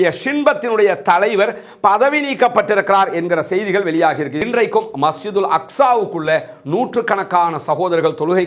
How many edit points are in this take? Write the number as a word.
one